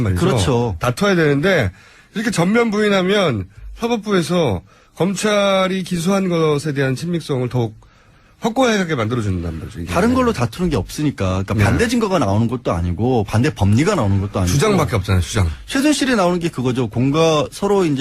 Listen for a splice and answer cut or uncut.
cut